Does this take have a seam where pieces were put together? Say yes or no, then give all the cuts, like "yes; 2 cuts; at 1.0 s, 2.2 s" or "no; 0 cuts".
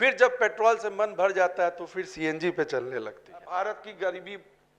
yes; 1 cut; at 3.3 s